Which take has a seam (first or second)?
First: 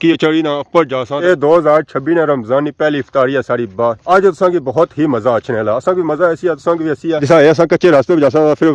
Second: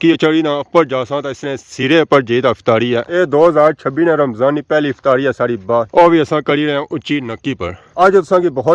first